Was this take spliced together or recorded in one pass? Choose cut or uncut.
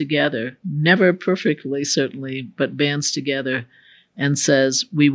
uncut